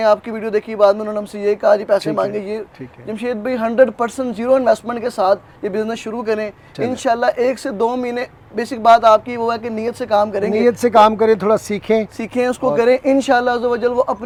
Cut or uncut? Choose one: uncut